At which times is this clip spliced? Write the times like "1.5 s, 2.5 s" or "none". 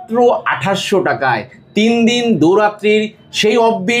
none